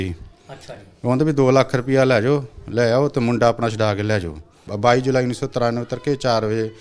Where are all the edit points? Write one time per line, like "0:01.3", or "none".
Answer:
0:04.6